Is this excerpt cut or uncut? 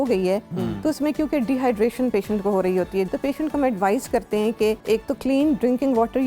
cut